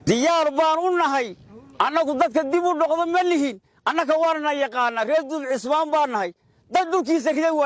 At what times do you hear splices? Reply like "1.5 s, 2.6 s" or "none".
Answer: none